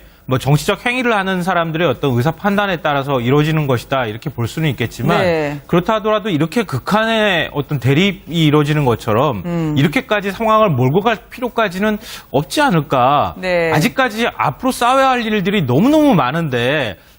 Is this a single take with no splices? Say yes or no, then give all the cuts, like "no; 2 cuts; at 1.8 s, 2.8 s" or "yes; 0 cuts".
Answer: no; 1 cut; at 14.6 s